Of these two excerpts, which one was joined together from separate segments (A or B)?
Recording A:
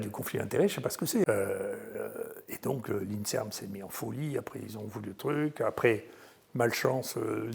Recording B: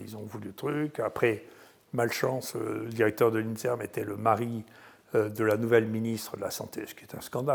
A